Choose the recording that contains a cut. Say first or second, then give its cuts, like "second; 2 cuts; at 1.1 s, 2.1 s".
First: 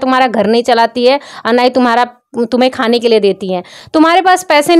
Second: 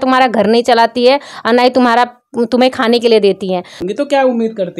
second; 1 cut; at 3.8 s